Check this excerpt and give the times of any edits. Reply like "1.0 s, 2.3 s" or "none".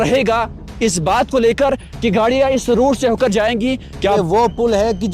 4.2 s